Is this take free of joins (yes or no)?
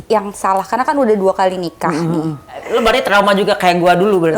no